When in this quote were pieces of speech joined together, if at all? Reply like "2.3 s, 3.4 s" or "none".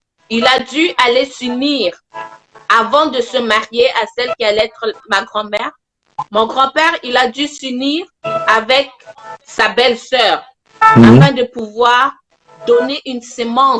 none